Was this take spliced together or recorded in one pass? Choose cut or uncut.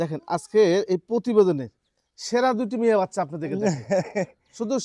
uncut